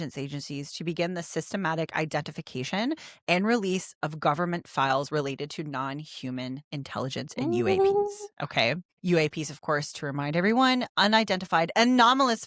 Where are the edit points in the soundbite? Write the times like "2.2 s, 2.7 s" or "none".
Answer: 8.9 s